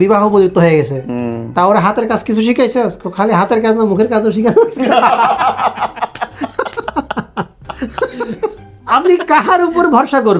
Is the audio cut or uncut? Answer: cut